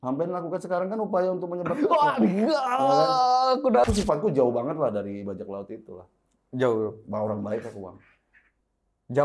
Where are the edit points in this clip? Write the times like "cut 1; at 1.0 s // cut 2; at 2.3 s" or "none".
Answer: cut 1; at 3.9 s